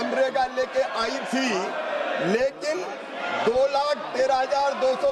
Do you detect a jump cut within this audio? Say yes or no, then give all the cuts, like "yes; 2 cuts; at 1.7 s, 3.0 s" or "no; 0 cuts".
no; 0 cuts